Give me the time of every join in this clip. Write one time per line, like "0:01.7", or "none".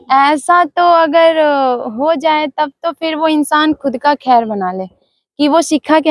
none